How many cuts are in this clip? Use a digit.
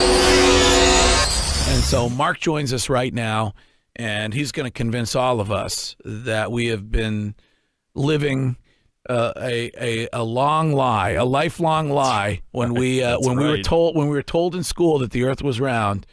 0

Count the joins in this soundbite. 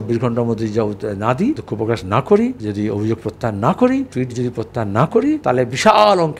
4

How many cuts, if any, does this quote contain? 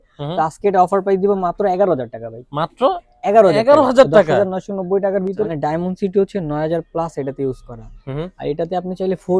1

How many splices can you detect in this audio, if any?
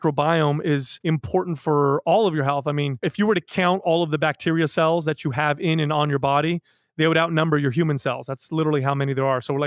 1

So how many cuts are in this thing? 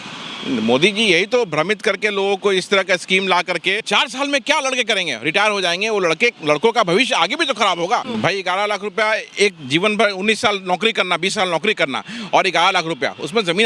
2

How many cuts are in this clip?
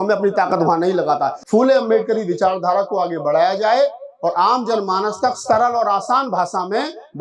1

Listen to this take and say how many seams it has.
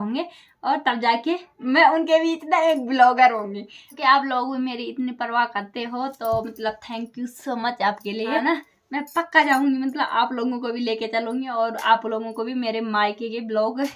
2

